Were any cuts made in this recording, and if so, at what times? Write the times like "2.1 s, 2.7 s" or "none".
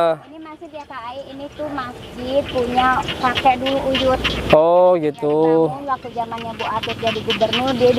none